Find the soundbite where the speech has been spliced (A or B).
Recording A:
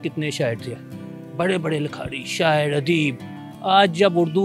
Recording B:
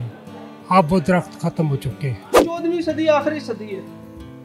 B